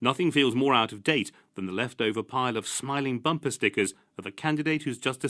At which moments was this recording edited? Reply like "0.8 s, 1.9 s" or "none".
none